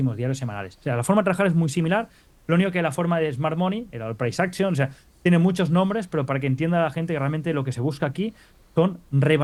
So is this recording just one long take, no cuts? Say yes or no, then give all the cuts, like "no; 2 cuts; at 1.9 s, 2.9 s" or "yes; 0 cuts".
yes; 0 cuts